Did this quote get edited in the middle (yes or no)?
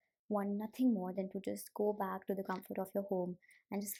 no